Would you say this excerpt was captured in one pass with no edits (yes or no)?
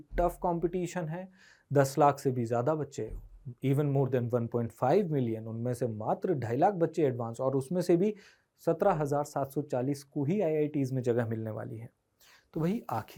yes